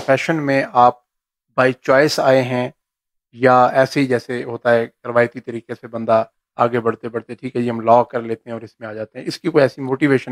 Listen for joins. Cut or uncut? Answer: uncut